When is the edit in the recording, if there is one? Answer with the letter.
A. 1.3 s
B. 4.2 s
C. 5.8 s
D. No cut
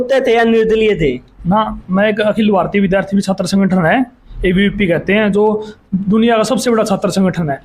D